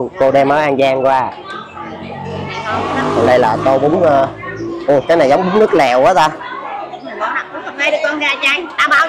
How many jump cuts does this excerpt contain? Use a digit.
0